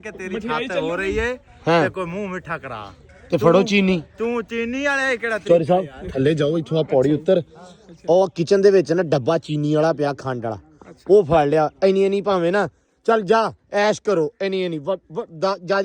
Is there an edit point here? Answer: no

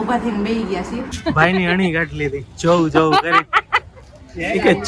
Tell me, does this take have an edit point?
yes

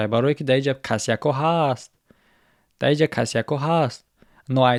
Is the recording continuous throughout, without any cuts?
yes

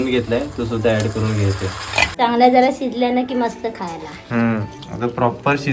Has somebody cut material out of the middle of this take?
yes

